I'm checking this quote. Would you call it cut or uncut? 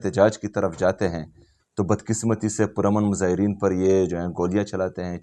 uncut